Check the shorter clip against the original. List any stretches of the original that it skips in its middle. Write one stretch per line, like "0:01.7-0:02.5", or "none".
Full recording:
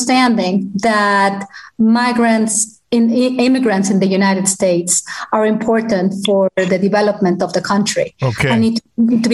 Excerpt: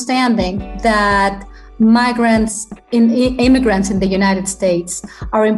none

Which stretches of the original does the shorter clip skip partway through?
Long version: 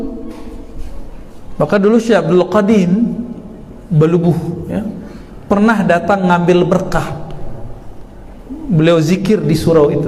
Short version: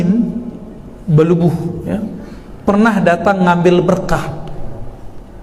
none

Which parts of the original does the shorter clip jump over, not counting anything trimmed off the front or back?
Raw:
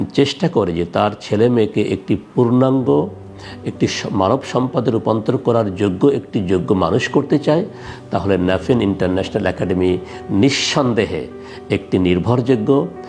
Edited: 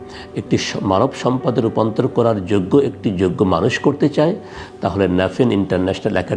none

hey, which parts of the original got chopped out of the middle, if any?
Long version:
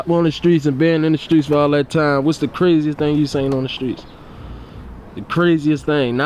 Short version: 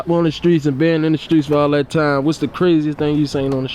none

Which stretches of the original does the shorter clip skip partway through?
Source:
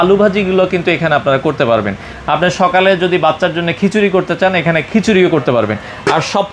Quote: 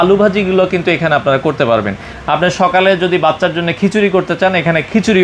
none

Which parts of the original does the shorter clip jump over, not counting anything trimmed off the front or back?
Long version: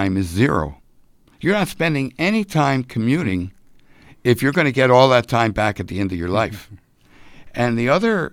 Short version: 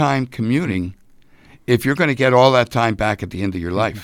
none

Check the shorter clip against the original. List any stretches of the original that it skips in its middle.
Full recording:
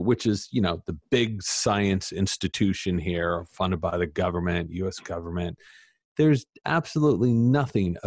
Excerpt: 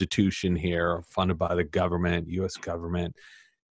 none

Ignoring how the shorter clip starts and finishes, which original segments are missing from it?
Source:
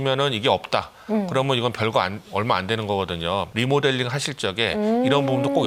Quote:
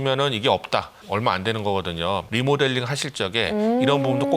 0:01.0-0:02.2

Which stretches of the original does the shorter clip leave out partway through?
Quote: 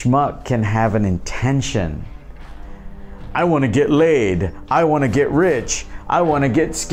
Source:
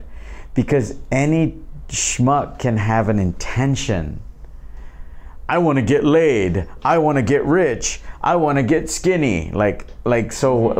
none

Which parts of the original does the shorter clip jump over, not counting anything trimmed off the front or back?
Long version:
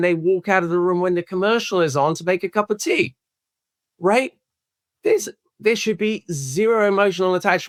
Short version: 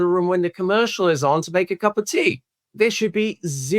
0:03.3-0:05.4

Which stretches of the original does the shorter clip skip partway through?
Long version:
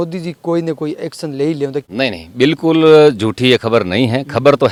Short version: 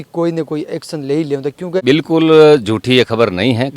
0:01.9-0:02.1

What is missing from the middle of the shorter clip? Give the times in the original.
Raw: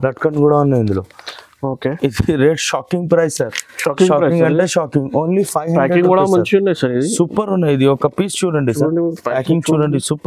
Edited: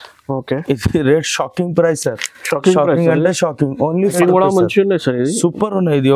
0:05.5-0:05.9

